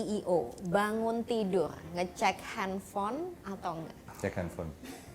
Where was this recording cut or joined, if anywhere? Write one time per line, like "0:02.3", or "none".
0:04.1